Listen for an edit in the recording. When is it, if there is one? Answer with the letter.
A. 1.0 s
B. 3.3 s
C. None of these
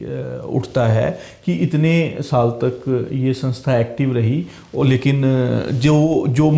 C